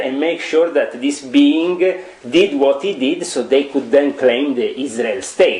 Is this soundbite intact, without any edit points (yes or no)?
yes